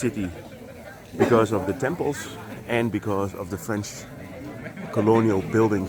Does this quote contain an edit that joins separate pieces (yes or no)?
no